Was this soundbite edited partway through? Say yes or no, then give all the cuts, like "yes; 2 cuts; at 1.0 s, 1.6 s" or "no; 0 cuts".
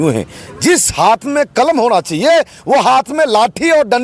no; 0 cuts